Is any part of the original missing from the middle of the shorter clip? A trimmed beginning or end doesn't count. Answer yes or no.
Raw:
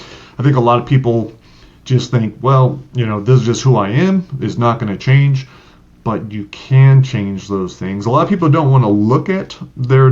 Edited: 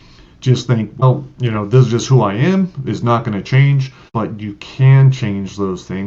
yes